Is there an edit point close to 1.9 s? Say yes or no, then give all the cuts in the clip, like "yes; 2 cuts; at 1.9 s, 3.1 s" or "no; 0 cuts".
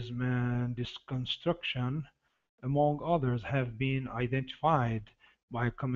no; 1 cut; at 3.7 s